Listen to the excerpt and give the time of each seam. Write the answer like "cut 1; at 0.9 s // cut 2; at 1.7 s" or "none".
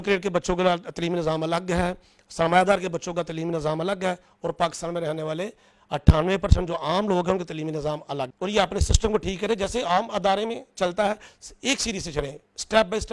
cut 1; at 8.3 s